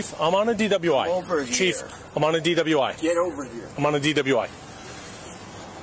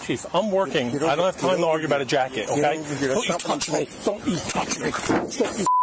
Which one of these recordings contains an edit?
second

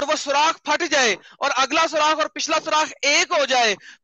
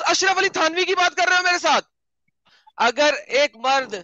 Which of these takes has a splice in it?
second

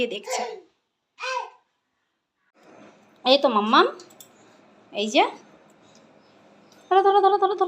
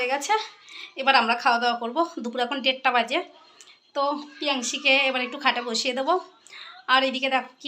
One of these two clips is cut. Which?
first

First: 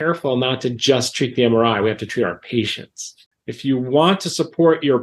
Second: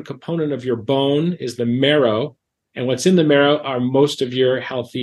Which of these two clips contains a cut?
first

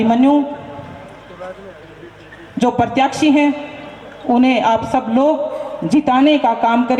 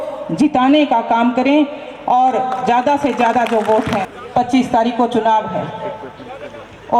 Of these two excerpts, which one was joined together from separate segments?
second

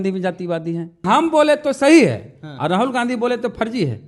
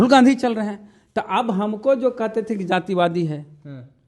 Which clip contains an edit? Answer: first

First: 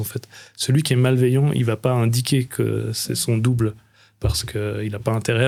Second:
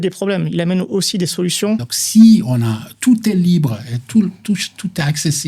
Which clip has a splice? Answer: second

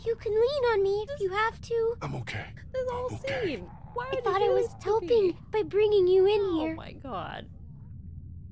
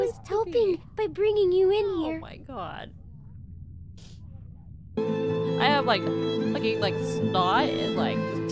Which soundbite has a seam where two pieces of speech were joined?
second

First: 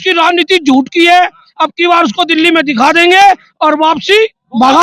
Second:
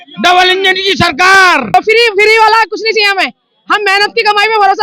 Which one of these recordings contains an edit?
second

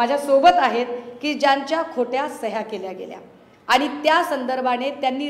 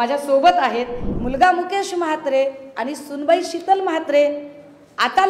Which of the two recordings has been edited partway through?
second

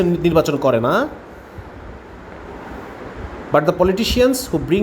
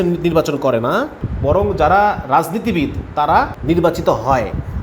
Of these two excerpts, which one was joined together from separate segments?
second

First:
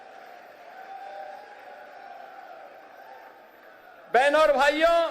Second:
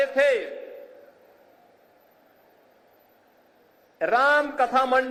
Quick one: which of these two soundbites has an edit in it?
first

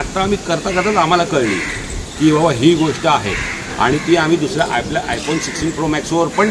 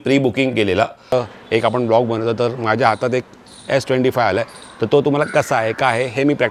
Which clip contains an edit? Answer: second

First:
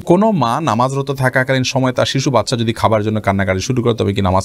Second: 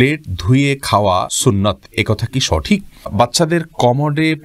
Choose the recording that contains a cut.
second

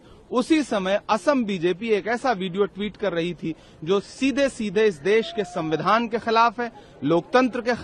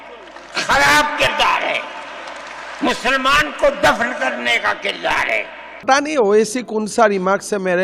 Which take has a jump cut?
second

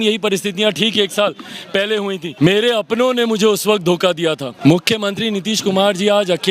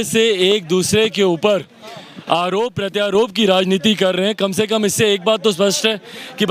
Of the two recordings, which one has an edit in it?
first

